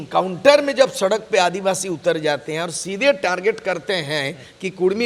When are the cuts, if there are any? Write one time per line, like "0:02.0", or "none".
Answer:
none

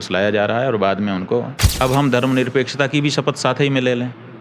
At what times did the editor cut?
0:01.6

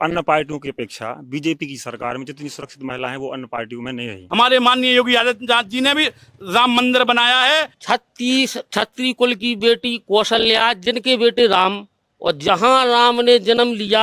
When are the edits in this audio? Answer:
0:04.2
0:07.8

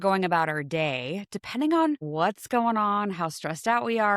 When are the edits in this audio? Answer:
0:02.1

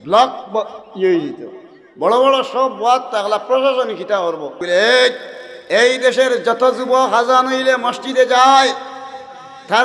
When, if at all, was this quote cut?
0:04.6

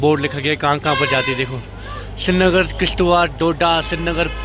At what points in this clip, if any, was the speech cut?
none

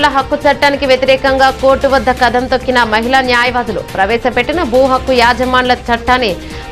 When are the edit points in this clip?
none

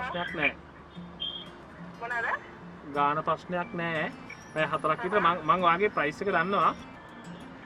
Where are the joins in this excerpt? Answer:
none

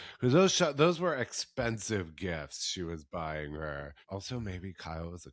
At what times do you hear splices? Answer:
0:03.9

